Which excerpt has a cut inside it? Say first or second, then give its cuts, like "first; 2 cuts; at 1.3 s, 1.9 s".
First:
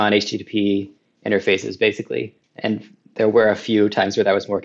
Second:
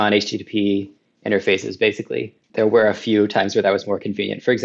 second; 1 cut; at 2.4 s